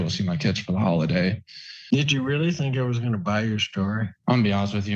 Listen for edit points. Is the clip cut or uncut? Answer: cut